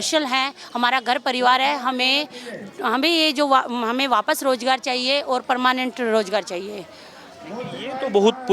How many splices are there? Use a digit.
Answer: 0